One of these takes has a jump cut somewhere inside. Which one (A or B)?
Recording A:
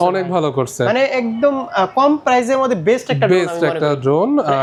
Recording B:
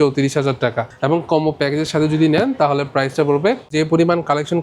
B